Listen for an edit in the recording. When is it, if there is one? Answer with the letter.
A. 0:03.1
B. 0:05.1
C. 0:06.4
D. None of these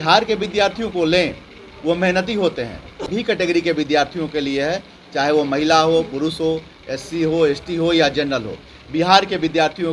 A